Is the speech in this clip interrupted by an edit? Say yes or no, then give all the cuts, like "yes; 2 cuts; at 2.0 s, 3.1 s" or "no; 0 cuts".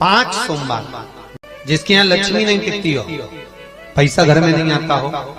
yes; 1 cut; at 1.4 s